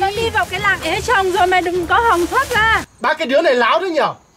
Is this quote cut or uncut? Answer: cut